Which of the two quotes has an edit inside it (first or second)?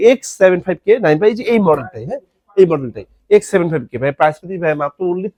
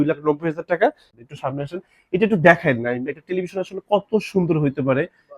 second